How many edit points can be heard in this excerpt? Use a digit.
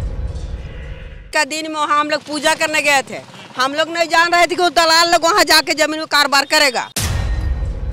2